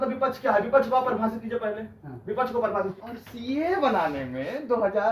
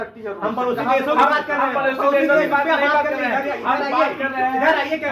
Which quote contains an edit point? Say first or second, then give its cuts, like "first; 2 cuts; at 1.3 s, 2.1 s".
first; 1 cut; at 2.9 s